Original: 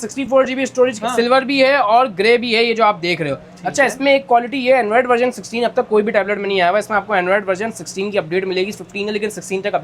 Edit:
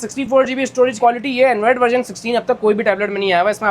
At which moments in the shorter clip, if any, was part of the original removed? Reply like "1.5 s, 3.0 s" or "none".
1.0 s